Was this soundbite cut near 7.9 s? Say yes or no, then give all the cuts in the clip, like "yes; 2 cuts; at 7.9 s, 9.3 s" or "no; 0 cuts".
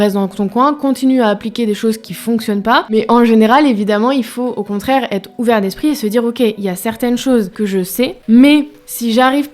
yes; 2 cuts; at 2.9 s, 7.9 s